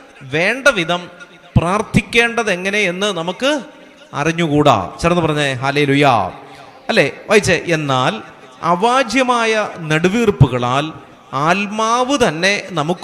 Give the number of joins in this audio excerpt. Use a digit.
0